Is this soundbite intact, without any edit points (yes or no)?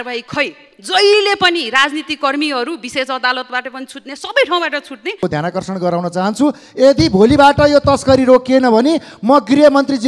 no